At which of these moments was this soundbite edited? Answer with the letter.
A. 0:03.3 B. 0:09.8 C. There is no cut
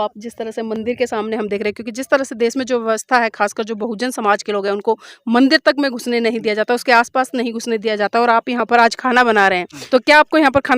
B